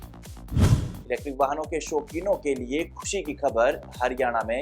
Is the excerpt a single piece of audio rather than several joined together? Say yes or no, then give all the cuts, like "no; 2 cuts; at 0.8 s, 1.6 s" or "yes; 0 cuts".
no; 1 cut; at 1.0 s